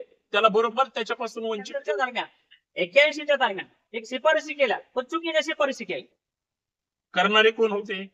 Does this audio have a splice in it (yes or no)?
yes